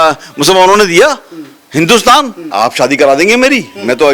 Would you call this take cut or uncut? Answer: cut